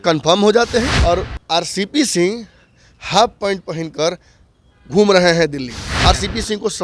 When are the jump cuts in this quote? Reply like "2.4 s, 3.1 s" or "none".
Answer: 0.9 s, 5.8 s